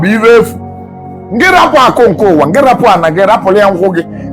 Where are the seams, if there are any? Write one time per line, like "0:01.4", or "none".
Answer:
none